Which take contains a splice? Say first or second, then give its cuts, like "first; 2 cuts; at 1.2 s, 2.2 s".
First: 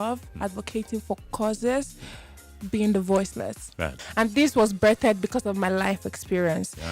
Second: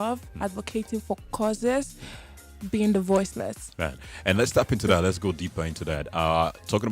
first; 1 cut; at 4.0 s